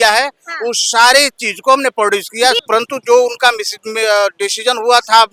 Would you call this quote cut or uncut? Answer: cut